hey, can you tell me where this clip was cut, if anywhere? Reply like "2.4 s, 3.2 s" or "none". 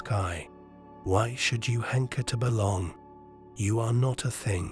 none